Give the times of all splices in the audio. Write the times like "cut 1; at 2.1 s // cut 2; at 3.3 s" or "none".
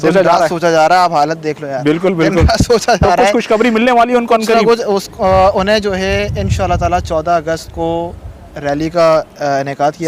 none